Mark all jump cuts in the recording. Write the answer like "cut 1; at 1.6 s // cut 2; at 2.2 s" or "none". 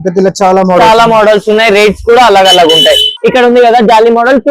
cut 1; at 3.1 s